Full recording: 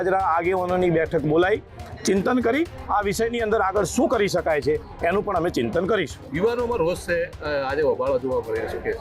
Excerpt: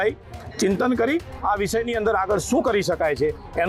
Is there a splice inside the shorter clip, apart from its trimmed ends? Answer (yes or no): no